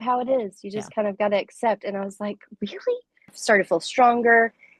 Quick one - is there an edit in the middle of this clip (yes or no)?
yes